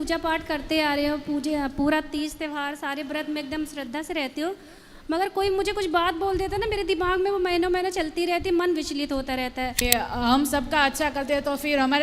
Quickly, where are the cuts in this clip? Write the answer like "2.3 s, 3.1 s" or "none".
9.8 s